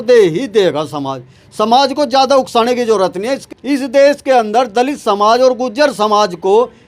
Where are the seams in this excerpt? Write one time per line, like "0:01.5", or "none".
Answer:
0:03.4